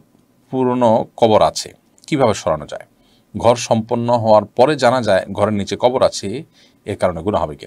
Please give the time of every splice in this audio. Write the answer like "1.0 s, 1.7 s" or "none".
none